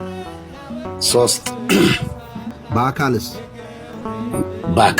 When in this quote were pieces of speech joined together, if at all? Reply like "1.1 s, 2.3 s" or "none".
2.6 s, 3.9 s